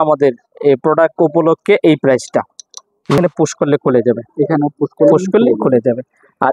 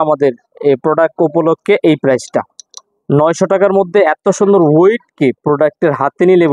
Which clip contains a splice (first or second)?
first